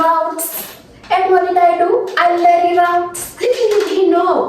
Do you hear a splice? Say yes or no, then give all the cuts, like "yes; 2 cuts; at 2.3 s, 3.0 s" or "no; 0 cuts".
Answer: yes; 1 cut; at 3.2 s